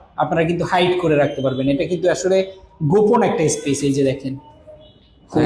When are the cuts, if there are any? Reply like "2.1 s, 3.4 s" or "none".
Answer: none